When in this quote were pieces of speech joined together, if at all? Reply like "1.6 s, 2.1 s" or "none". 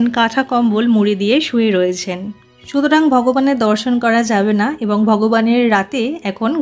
none